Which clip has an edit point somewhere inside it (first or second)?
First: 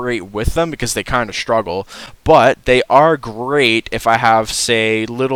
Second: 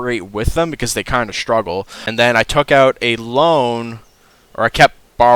second